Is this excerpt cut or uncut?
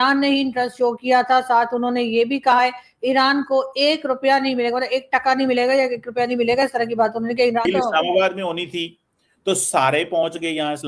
cut